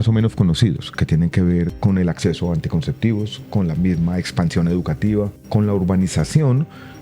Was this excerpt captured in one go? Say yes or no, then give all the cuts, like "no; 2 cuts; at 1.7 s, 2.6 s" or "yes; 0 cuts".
no; 1 cut; at 5.4 s